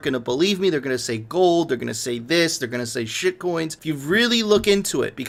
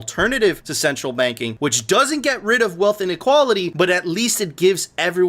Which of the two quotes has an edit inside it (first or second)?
second